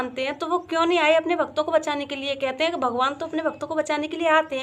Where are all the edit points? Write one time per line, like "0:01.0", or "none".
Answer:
none